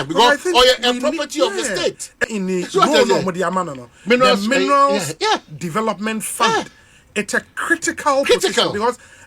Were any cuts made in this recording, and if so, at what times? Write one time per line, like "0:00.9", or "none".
0:02.2